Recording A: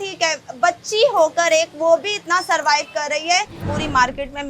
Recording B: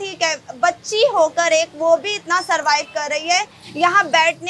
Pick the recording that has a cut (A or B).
A